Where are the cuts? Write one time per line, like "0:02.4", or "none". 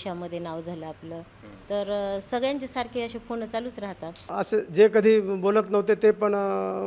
0:04.2